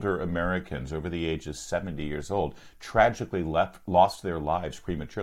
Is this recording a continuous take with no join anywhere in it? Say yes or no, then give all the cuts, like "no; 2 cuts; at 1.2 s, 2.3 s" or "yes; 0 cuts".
yes; 0 cuts